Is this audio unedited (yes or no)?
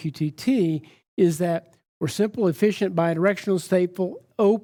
yes